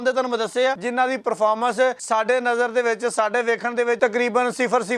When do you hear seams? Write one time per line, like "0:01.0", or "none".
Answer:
0:00.8
0:02.0
0:04.0